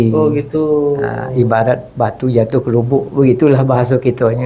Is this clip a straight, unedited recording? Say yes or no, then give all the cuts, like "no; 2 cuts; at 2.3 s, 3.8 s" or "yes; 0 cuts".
yes; 0 cuts